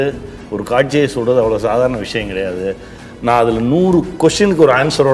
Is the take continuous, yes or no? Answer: yes